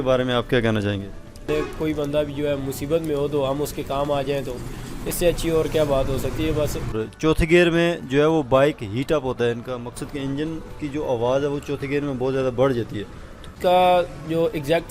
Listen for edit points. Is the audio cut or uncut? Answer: cut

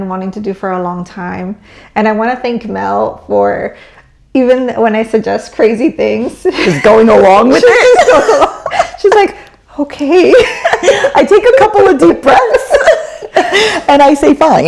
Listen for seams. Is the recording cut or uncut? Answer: uncut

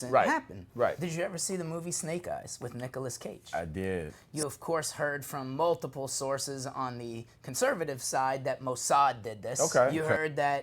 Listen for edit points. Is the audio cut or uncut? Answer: cut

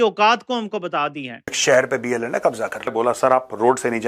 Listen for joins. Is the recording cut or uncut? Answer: cut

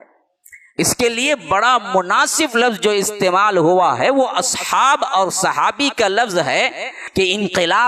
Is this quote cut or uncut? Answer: cut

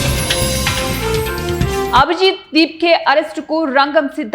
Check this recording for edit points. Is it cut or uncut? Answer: uncut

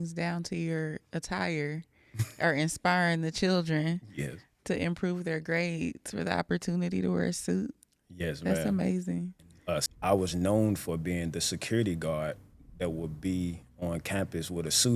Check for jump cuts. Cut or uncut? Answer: cut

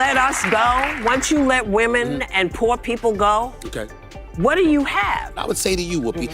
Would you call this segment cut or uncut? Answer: cut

